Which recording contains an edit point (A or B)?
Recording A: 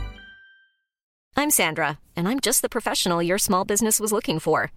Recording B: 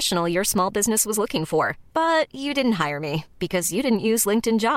A